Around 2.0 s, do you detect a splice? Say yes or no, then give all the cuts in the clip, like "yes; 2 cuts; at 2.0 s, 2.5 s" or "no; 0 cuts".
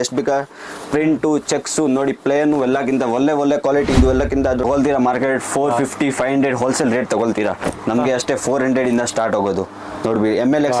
no; 1 cut; at 4.7 s